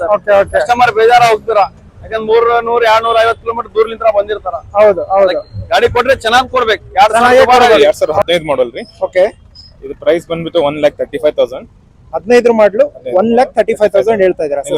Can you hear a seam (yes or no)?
yes